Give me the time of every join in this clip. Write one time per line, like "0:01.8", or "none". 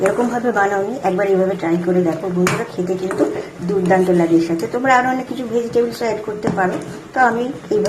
none